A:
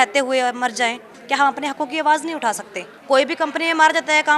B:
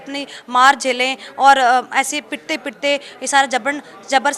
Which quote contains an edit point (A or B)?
A